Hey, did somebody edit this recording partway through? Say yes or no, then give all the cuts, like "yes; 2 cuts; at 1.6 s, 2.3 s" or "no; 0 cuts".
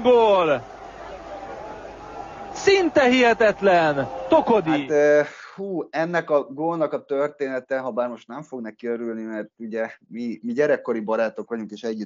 yes; 1 cut; at 4.7 s